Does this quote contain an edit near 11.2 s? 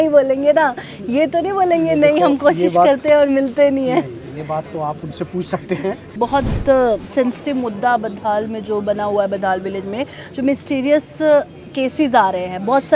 no; 1 cut; at 6.1 s

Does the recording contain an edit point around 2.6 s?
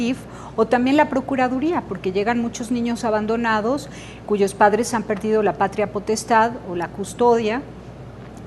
yes; 1 cut; at 2.6 s

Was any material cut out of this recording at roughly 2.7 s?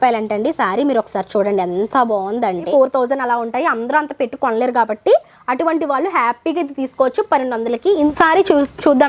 yes; 2 cuts; at 2.7 s, 8.1 s

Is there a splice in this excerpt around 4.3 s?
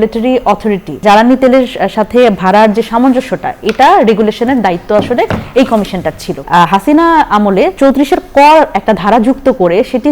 no; 3 cuts; at 1.0 s, 6.4 s, 7.7 s

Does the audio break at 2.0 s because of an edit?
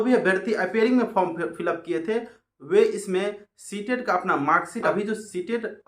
no; 1 cut; at 4.9 s

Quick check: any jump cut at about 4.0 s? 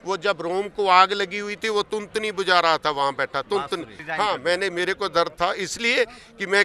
yes; 1 cut; at 4.0 s

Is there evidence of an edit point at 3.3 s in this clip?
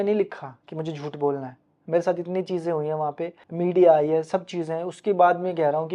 no; 0 cuts

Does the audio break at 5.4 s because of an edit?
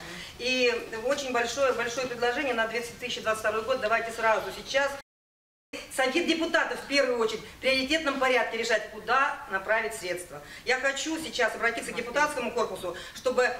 yes; 1 cut; at 5.4 s

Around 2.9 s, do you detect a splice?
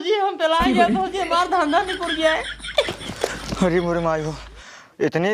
yes; 1 cut; at 2.9 s

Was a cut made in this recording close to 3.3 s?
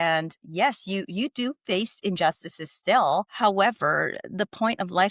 yes; 1 cut; at 3.3 s

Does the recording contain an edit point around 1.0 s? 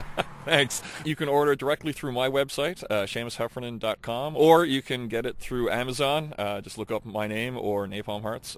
yes; 1 cut; at 1.0 s

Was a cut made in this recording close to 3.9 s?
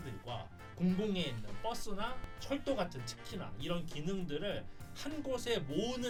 no; 0 cuts

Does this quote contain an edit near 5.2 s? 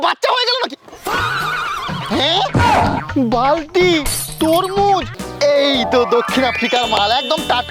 yes; 1 cut; at 5.2 s

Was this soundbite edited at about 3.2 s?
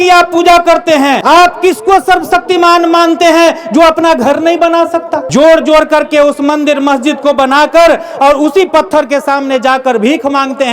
no; 2 cuts; at 1.2 s, 5.2 s

